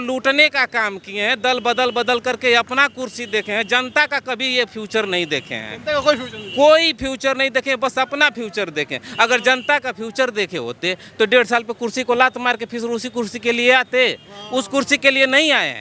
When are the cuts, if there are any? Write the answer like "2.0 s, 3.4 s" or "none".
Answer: none